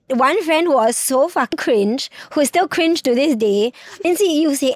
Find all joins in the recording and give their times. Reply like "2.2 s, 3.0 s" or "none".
1.5 s, 4.0 s